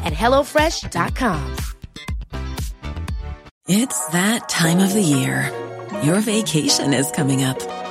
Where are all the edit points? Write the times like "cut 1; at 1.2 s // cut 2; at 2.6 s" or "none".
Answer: cut 1; at 3.5 s